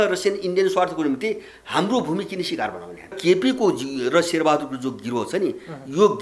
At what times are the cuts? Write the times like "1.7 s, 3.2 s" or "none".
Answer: 3.2 s